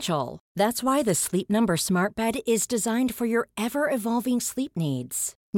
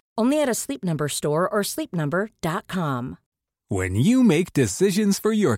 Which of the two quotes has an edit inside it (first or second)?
second